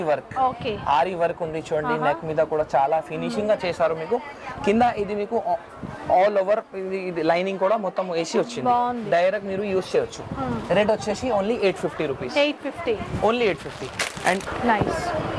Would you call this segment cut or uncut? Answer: uncut